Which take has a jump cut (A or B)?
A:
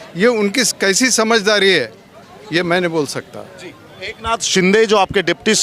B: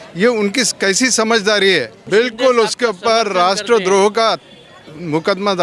B